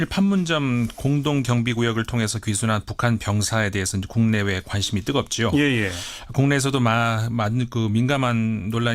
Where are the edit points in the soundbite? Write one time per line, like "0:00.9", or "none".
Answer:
none